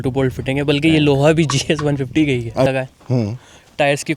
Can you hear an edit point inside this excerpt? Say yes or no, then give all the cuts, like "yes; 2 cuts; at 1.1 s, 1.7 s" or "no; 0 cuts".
yes; 1 cut; at 2.7 s